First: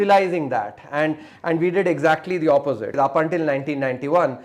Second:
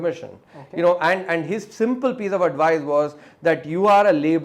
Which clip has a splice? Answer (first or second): first